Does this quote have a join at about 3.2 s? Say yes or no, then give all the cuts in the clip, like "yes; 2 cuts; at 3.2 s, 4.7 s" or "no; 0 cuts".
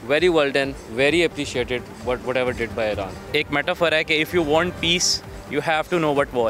yes; 1 cut; at 3.2 s